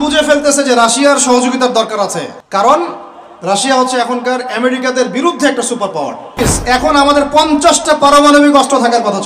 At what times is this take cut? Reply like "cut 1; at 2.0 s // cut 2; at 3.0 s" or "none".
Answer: cut 1; at 2.4 s // cut 2; at 6.4 s